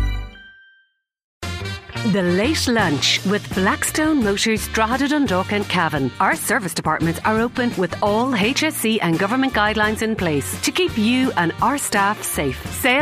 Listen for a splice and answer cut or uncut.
cut